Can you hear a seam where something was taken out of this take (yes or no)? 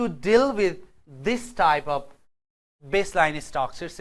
no